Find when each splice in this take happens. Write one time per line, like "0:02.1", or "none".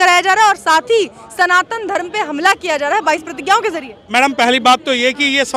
none